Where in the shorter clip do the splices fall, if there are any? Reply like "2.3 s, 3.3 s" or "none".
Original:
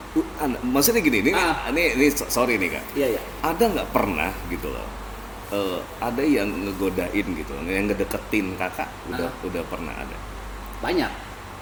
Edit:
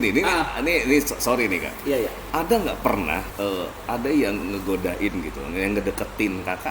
3.3 s